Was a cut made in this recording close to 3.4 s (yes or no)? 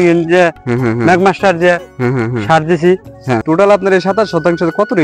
yes